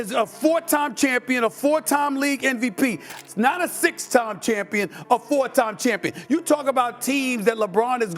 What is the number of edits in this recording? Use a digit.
1